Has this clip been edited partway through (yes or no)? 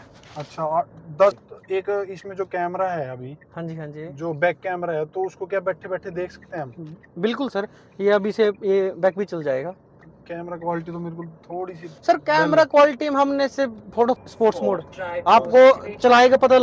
yes